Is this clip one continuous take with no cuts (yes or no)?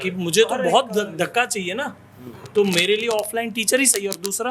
yes